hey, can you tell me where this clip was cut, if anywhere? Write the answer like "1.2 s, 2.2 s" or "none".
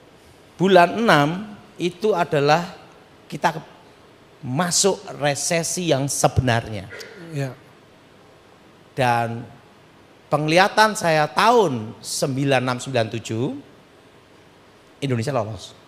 none